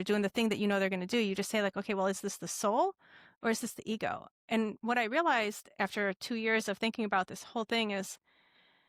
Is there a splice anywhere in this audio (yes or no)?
no